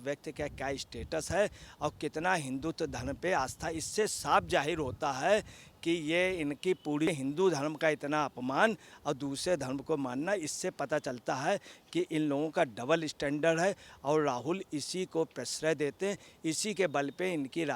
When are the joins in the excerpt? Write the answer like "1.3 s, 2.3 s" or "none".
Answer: 7.1 s